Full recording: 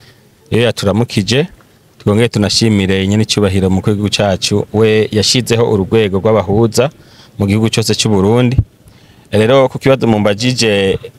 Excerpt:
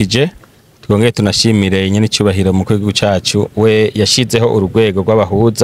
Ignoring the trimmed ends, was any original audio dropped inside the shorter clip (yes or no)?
no